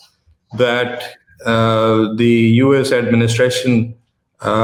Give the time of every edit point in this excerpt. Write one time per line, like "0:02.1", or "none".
none